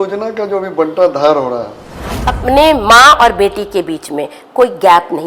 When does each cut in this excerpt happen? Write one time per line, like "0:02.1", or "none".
0:02.3